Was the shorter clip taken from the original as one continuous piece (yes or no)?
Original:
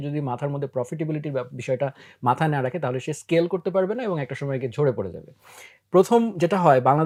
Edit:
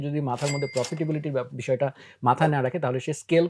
yes